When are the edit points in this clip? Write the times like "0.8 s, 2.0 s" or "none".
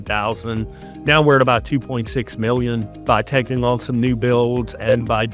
none